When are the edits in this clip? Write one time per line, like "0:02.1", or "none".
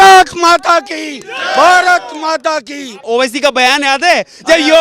0:03.0